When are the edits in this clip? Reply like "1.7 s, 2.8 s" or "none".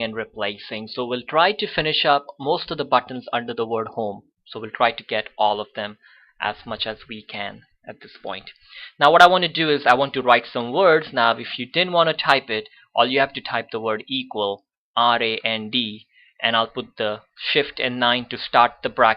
7.7 s